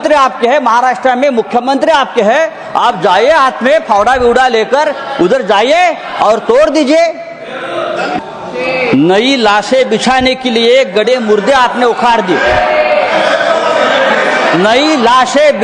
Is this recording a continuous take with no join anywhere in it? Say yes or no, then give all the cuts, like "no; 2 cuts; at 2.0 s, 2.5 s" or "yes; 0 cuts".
no; 1 cut; at 8.1 s